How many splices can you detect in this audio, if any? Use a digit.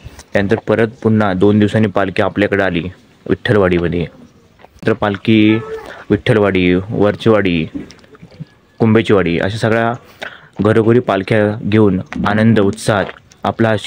1